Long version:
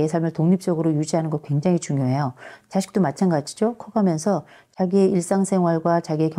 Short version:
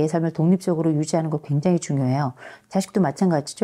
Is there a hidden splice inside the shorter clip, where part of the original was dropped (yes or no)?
no